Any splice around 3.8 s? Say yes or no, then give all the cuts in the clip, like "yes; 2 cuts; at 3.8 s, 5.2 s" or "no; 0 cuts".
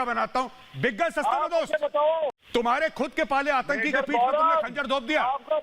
no; 1 cut; at 2.4 s